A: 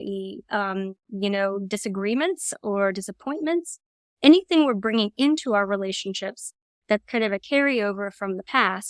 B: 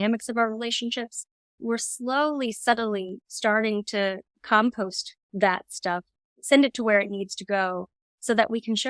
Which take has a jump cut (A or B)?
B